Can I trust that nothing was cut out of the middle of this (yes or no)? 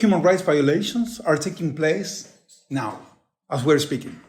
yes